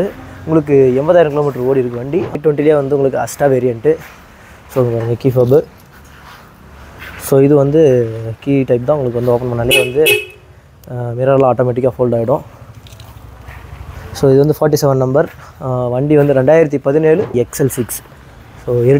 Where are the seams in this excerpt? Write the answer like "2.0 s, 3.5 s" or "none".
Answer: 2.3 s, 17.3 s